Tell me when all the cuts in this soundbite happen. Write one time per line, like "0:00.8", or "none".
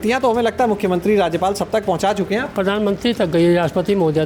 none